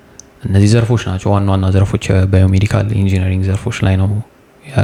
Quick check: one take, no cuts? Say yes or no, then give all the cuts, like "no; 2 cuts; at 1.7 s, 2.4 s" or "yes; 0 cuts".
yes; 0 cuts